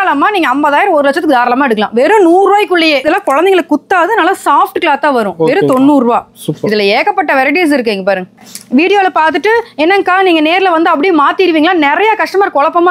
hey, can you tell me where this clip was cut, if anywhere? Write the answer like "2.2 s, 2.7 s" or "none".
3.0 s, 8.4 s